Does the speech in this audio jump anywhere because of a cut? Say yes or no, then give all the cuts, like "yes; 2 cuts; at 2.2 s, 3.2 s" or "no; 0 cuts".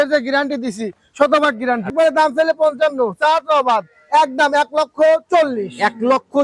yes; 1 cut; at 1.9 s